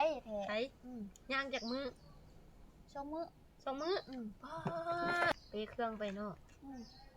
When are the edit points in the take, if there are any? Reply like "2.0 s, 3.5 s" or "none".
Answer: 5.3 s